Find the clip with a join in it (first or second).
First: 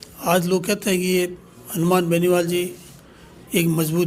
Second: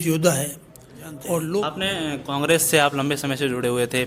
second